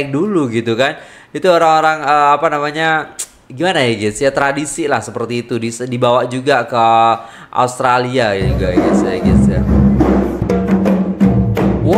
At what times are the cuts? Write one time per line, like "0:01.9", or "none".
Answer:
0:10.4